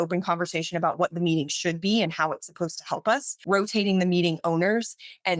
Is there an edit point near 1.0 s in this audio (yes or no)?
no